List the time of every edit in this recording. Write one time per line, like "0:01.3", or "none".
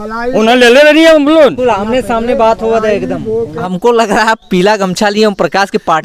0:03.7